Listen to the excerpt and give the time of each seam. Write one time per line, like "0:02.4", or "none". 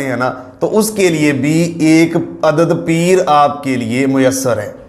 none